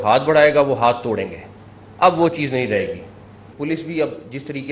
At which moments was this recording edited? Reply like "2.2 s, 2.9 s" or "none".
3.5 s